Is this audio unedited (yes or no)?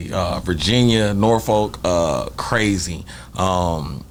yes